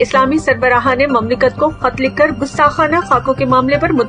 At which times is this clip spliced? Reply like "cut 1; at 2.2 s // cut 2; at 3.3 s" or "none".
none